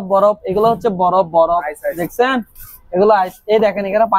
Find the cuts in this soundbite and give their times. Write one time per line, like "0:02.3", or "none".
none